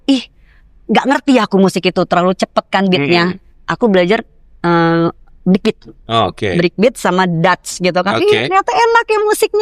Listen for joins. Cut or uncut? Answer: uncut